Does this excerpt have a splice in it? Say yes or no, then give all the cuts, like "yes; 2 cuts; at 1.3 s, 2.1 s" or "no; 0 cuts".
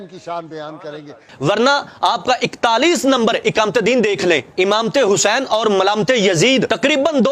yes; 1 cut; at 1.2 s